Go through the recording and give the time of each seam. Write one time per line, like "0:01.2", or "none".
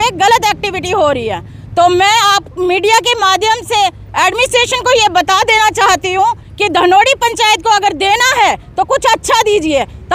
none